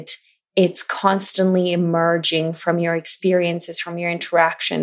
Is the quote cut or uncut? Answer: uncut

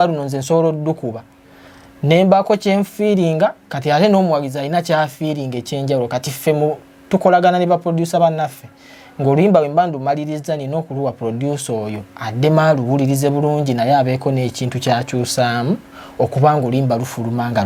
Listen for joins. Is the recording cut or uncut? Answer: uncut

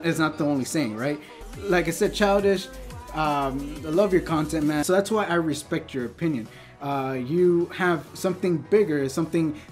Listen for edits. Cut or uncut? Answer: cut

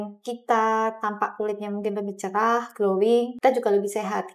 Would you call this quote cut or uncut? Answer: cut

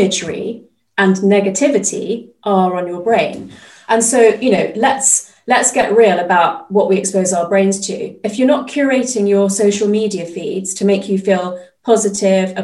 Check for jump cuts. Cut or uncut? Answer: uncut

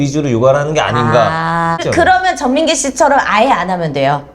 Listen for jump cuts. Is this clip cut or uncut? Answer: cut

